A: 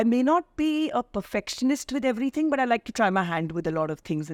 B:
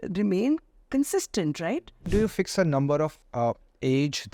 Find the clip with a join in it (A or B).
B